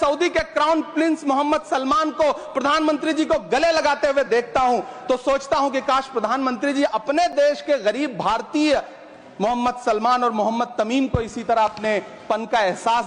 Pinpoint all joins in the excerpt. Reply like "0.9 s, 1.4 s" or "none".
none